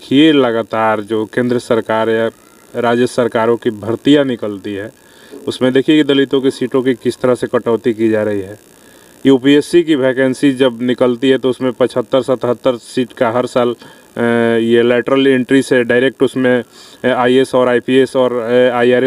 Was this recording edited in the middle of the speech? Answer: no; 0 cuts

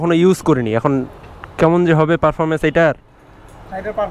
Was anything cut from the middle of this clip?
no; 0 cuts

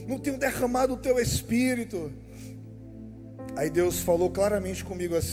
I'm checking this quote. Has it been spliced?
no; 0 cuts

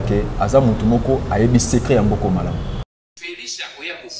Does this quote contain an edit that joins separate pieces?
yes; 1 cut; at 2.8 s

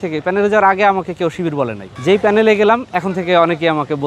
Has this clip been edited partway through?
no; 0 cuts

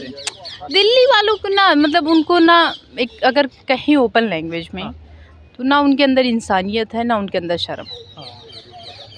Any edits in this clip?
no; 0 cuts

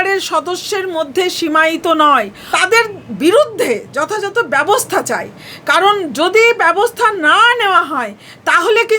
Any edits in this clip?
yes; 1 cut; at 2.4 s

